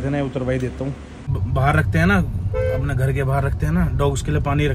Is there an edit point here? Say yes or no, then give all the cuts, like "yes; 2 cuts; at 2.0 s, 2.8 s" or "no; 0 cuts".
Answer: yes; 1 cut; at 1.4 s